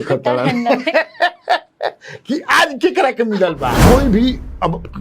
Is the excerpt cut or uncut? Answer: cut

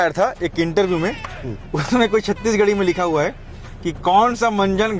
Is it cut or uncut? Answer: uncut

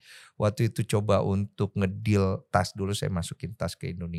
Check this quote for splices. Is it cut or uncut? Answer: uncut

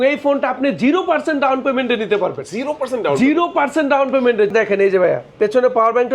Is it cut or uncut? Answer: cut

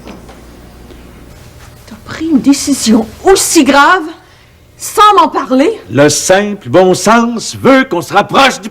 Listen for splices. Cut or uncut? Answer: cut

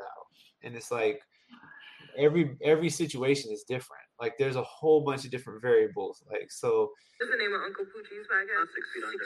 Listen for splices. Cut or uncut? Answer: cut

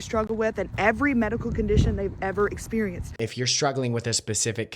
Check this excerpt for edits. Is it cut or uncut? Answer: cut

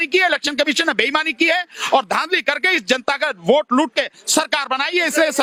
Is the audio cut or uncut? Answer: uncut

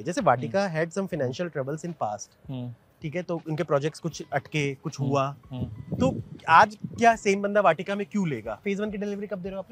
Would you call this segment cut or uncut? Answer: cut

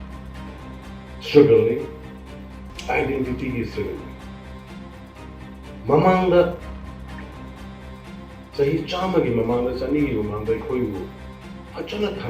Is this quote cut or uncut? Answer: cut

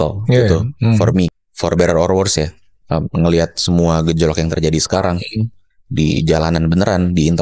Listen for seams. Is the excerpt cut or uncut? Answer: cut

